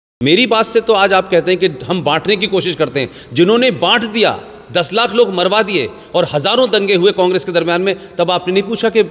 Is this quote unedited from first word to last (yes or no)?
yes